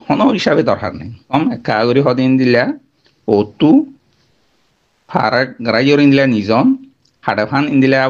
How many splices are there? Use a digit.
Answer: 1